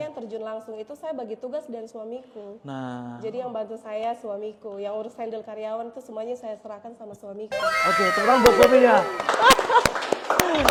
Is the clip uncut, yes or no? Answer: yes